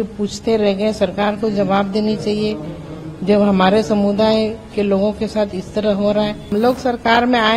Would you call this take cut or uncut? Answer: cut